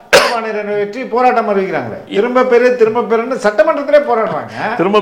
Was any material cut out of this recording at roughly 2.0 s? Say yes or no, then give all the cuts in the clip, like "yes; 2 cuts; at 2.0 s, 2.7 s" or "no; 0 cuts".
yes; 1 cut; at 2.0 s